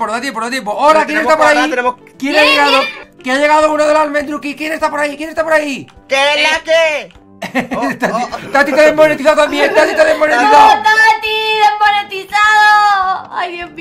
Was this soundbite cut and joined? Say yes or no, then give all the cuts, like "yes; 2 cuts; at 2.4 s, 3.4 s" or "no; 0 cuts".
yes; 2 cuts; at 2.1 s, 5.9 s